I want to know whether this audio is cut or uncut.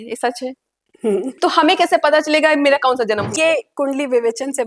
cut